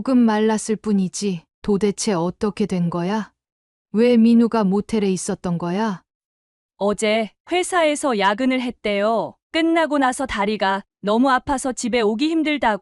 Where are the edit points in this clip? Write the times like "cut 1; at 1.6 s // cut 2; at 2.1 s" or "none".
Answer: cut 1; at 1.5 s // cut 2; at 6.1 s